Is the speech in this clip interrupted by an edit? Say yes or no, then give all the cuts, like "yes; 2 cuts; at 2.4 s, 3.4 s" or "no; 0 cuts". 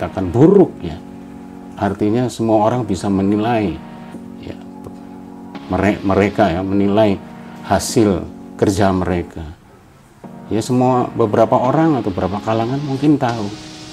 no; 0 cuts